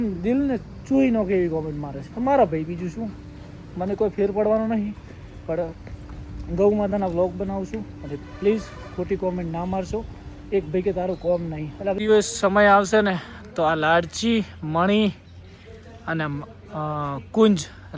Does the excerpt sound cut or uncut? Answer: cut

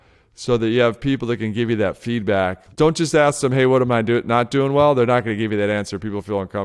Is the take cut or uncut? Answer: cut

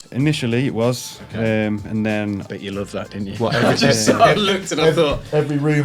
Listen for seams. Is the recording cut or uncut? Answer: uncut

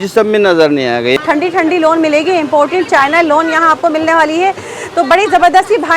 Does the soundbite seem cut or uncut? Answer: cut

